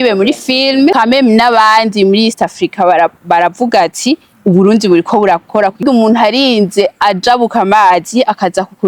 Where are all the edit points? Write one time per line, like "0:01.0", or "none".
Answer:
0:00.9
0:05.8